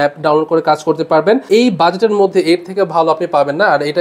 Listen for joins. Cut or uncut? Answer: cut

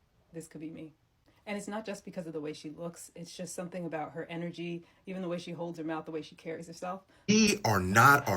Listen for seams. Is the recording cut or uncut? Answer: cut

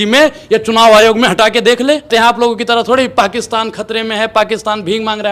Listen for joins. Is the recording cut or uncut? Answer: cut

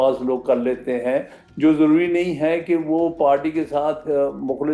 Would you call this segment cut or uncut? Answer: uncut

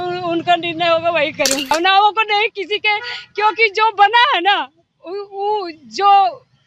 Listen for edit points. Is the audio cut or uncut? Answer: cut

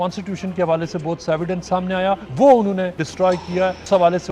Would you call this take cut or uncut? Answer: cut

